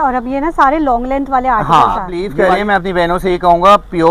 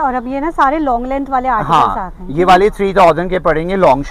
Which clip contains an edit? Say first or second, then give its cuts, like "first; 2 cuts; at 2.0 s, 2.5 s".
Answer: first; 1 cut; at 2.2 s